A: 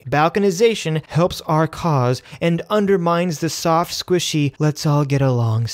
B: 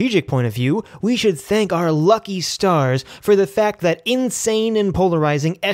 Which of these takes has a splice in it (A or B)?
A